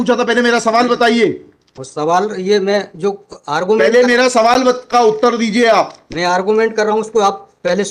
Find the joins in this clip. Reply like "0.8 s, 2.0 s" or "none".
none

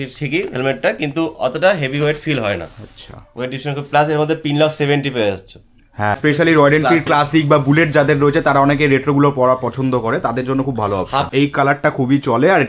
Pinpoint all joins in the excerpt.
6.2 s, 11.3 s

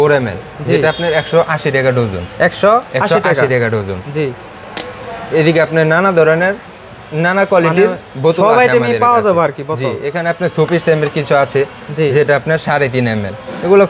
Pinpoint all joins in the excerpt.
none

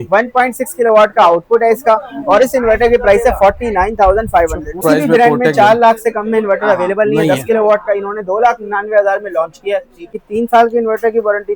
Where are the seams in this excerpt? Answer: 4.8 s, 10.1 s

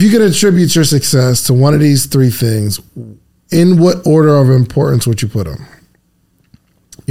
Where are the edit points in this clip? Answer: none

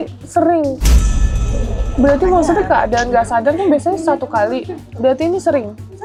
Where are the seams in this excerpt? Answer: none

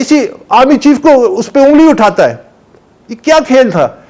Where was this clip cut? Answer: none

